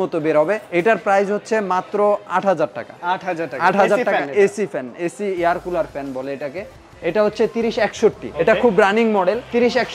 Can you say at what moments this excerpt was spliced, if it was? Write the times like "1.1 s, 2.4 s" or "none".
none